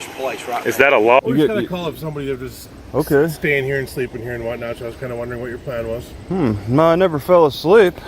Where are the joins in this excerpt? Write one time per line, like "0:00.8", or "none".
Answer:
0:01.2